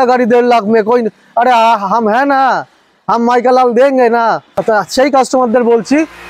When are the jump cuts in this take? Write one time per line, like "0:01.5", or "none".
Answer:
0:04.6